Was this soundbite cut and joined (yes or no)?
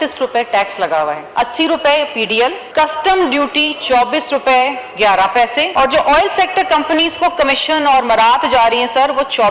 yes